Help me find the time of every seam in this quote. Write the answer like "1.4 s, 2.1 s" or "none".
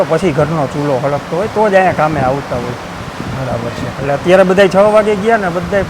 none